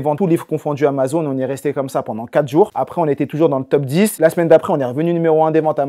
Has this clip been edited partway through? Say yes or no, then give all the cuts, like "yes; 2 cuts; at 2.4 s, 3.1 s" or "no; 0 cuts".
no; 0 cuts